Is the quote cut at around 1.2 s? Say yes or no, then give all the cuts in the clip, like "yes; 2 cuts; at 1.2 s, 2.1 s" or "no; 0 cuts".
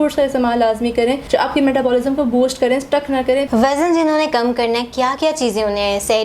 yes; 2 cuts; at 1.2 s, 3.5 s